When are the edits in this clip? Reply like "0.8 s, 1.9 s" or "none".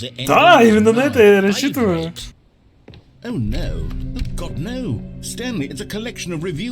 2.3 s